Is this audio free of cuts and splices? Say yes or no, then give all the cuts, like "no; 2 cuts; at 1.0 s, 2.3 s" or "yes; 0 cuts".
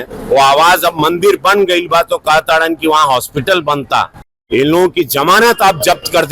no; 1 cut; at 4.3 s